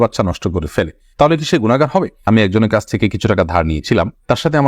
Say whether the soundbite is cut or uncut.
cut